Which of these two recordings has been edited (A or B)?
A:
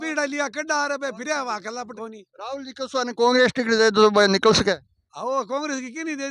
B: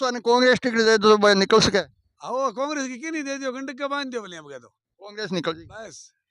A